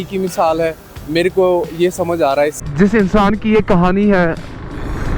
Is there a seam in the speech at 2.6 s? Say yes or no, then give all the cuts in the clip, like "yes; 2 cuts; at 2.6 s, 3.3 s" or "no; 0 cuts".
yes; 1 cut; at 2.6 s